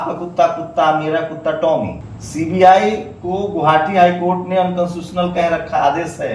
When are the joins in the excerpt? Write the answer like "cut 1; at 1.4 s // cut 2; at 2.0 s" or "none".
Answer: cut 1; at 2.0 s